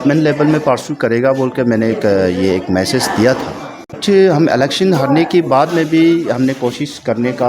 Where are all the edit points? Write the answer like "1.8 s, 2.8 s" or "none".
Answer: 4.0 s